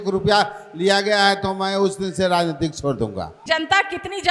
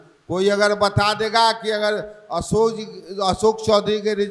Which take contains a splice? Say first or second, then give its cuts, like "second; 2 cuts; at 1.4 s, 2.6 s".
first; 1 cut; at 3.3 s